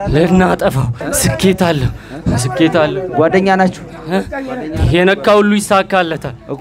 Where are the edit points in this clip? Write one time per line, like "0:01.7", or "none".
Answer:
0:01.0